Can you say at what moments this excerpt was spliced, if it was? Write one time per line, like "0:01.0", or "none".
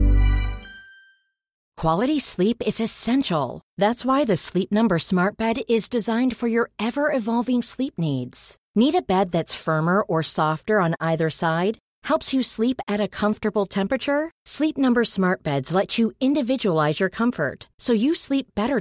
0:01.6